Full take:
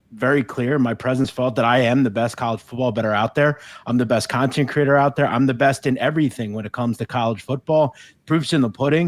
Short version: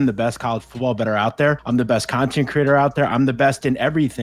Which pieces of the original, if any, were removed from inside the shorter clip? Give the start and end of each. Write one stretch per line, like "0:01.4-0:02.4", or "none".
0:03.6-0:03.8

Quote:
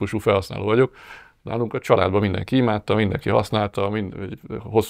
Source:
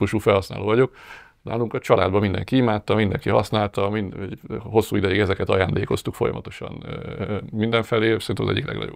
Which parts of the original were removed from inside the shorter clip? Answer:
none

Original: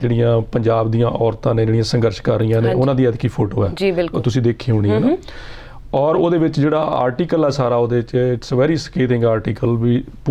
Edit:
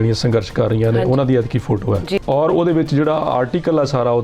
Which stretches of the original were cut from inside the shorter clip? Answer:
0:03.9-0:05.8

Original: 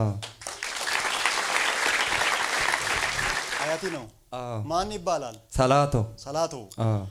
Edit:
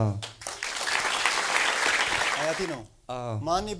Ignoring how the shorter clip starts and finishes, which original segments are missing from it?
0:02.4-0:03.6

